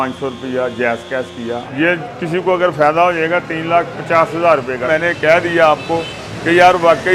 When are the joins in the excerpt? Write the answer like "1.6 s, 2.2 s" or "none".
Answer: 1.6 s, 4.9 s